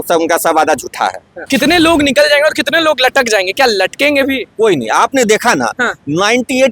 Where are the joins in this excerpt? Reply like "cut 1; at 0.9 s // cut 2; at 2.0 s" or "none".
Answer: cut 1; at 1.5 s